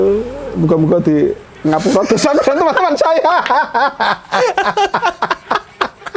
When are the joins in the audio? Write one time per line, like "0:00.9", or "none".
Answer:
none